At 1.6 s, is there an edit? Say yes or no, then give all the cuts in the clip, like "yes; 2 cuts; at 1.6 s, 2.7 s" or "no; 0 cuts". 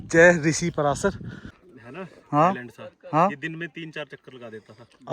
yes; 1 cut; at 1.6 s